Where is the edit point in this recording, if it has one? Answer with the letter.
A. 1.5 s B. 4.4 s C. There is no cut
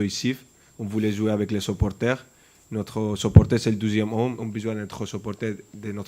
B